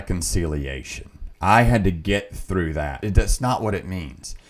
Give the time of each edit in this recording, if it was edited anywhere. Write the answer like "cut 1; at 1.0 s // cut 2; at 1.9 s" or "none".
cut 1; at 3.0 s